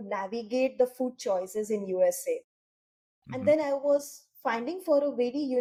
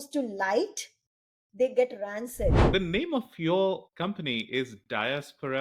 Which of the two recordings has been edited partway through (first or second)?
second